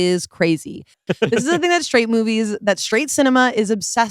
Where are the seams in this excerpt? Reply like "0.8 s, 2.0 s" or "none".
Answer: 1.0 s, 2.6 s